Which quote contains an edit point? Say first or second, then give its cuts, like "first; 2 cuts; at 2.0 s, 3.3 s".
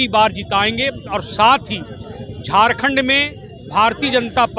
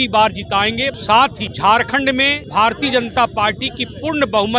second; 2 cuts; at 1.0 s, 2.4 s